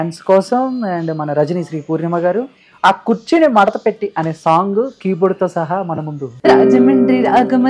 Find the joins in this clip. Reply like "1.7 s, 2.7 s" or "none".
6.2 s